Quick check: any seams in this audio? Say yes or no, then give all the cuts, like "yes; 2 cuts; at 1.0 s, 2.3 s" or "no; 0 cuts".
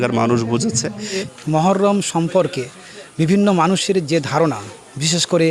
yes; 1 cut; at 1.3 s